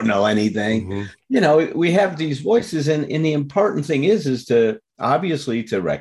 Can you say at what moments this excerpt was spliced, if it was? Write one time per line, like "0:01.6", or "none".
none